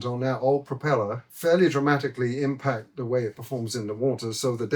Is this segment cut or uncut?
cut